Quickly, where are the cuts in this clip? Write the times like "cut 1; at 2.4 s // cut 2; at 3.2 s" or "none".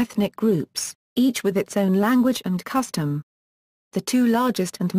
cut 1; at 1.9 s